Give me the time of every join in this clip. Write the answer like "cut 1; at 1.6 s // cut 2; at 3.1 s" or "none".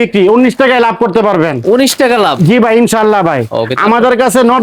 none